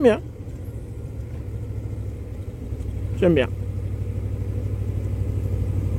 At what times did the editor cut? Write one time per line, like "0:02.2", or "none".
none